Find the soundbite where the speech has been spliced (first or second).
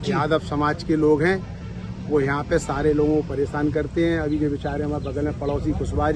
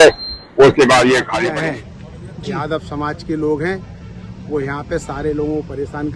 second